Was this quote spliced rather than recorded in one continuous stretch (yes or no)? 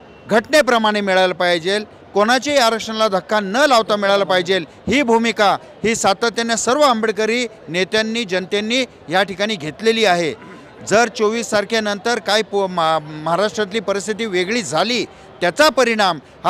no